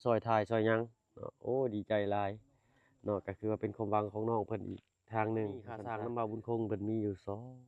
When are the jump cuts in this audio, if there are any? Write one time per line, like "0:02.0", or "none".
0:05.8